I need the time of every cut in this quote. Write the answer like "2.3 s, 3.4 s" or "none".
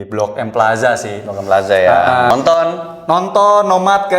2.3 s